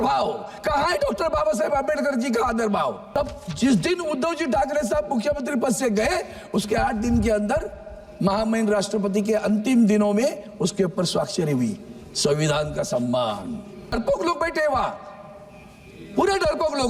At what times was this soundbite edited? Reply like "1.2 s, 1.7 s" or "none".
3.0 s, 13.9 s